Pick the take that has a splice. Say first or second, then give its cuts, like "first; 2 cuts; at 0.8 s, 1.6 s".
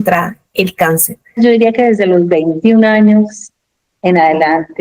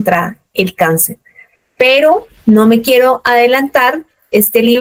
first; 1 cut; at 1.4 s